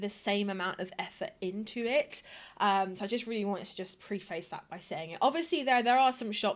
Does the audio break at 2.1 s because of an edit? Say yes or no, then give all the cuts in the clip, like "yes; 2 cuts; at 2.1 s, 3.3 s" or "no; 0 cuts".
no; 0 cuts